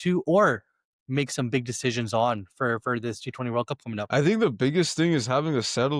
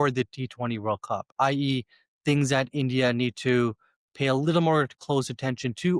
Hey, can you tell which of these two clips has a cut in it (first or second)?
first